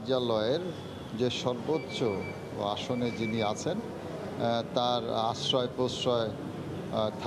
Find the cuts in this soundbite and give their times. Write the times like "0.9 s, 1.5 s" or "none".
none

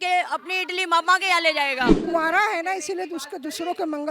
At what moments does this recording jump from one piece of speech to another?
2.0 s

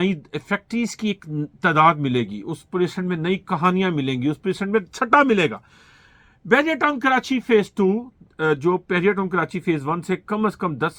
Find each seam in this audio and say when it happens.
none

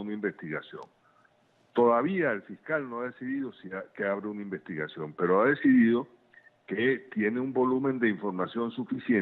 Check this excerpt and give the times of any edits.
5.7 s

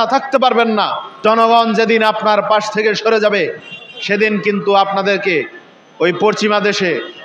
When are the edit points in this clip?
1.2 s

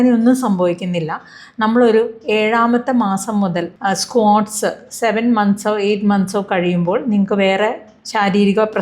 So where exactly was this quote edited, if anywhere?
3.7 s

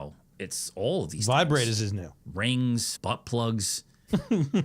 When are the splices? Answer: 2.9 s

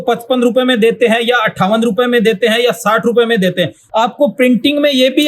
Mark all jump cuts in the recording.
3.8 s

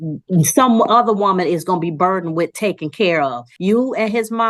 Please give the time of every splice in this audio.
3.5 s

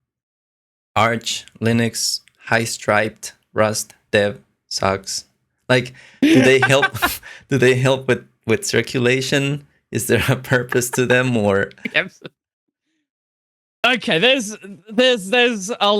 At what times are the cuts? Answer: none

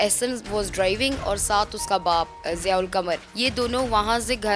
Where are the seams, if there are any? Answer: 2.4 s, 3.3 s

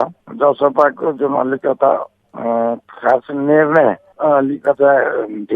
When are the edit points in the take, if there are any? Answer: none

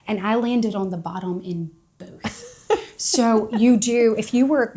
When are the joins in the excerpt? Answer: none

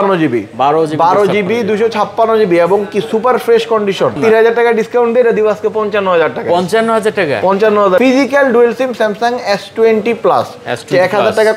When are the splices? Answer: 4.2 s, 8.0 s

